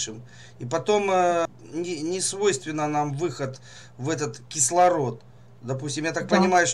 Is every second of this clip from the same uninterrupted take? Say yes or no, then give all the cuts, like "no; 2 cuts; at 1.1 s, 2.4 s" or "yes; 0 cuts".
no; 1 cut; at 1.4 s